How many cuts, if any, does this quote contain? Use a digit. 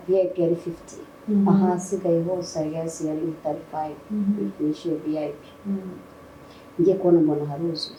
0